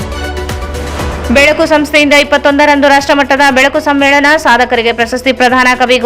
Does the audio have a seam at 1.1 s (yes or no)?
yes